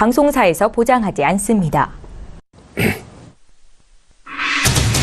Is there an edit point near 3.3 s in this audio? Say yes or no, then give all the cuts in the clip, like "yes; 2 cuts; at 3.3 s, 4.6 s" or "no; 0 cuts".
no; 1 cut; at 2.0 s